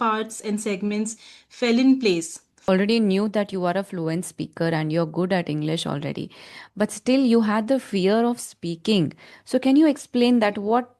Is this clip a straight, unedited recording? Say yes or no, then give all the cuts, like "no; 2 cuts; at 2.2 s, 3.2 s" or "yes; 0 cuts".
no; 1 cut; at 2.7 s